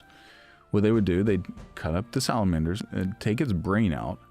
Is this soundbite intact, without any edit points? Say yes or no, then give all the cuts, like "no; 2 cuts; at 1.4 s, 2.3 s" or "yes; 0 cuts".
no; 1 cut; at 2.8 s